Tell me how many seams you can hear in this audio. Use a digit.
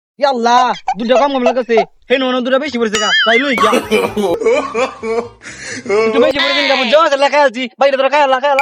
2